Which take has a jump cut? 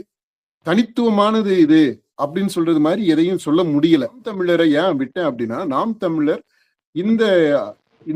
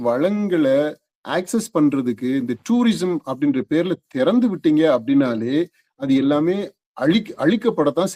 first; 1 cut; at 4.3 s

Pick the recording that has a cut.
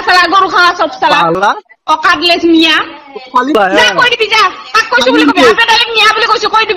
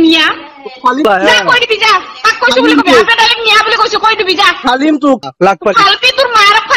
second; 1 cut; at 5.2 s

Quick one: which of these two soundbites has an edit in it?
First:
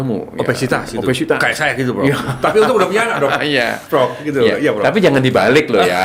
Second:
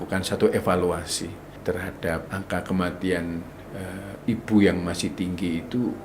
second; 2 cuts; at 1.5 s, 2.3 s

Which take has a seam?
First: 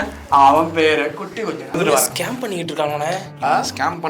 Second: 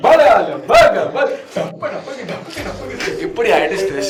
first; 1 cut; at 1.7 s

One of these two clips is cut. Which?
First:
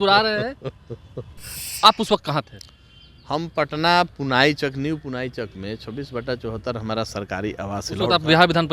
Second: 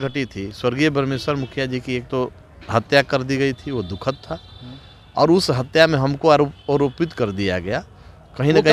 first; 1 cut; at 1.6 s

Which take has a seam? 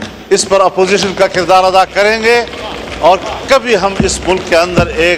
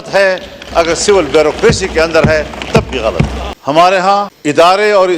second; 2 cuts; at 3.5 s, 4.3 s

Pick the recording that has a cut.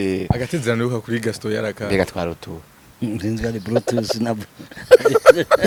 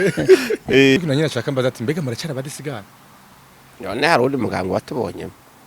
second; 1 cut; at 1.0 s

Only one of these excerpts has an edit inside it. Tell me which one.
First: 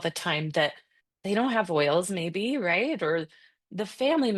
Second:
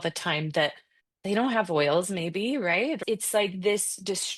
second; 1 cut; at 3.0 s

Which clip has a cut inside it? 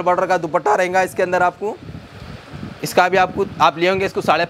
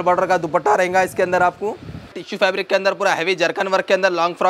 second; 1 cut; at 2.2 s

